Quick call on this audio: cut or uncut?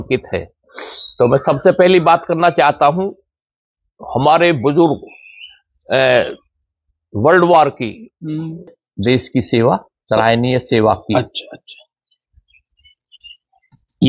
cut